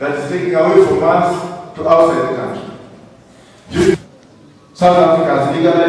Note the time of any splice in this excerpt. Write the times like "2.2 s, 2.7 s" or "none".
3.9 s